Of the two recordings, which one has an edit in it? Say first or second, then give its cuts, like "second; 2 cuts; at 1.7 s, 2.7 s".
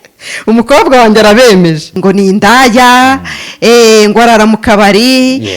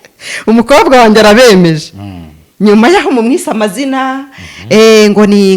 first; 1 cut; at 2.0 s